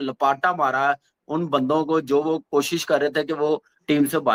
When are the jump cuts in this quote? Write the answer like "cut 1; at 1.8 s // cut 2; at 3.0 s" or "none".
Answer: none